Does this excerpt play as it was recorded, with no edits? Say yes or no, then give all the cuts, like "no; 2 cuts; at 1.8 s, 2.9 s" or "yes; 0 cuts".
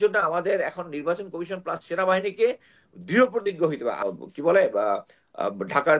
no; 1 cut; at 4.0 s